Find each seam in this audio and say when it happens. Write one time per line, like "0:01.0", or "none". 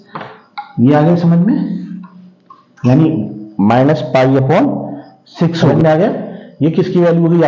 0:05.7